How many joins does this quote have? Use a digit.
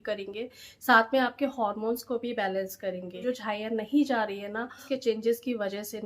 2